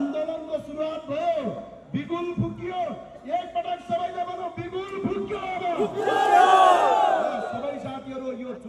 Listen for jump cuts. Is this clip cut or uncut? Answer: uncut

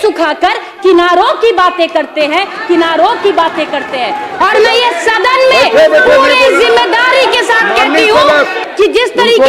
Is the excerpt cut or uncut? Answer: cut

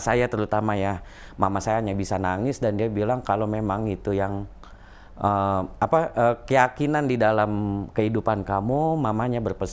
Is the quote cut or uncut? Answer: uncut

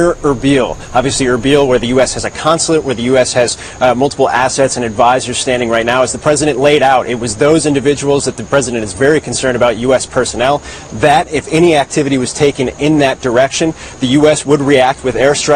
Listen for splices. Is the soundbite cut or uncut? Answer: uncut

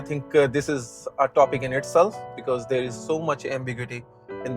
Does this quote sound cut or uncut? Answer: cut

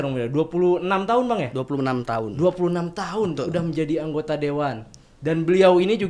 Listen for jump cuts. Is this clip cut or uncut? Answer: uncut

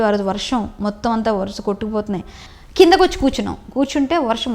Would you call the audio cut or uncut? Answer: cut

